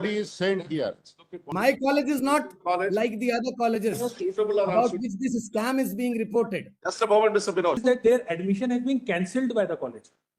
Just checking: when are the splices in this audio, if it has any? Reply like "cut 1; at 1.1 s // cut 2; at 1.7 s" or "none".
cut 1; at 1.4 s // cut 2; at 7.8 s